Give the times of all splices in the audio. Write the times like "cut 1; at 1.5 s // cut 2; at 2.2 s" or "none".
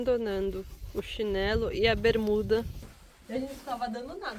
cut 1; at 2.8 s